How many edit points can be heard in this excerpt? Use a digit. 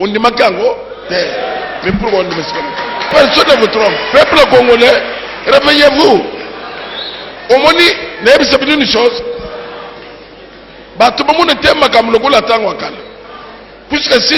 1